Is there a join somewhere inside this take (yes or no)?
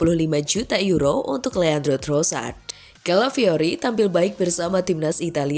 yes